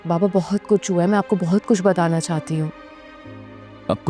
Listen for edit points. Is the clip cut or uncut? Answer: uncut